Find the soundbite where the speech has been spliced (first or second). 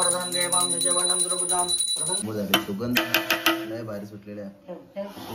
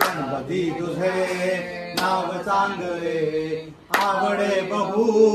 first